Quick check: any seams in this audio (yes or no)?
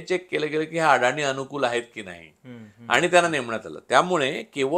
no